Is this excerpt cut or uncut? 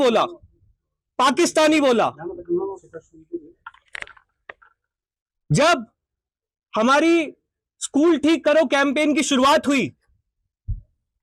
uncut